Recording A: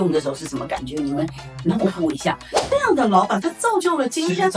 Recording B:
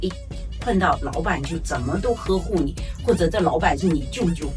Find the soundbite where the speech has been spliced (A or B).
A